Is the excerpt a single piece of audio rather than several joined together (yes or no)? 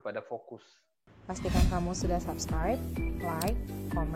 no